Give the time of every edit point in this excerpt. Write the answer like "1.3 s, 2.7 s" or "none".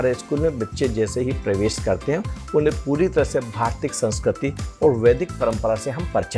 none